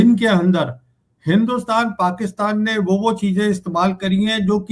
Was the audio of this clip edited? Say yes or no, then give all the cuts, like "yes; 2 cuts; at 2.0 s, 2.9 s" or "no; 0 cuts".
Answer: no; 0 cuts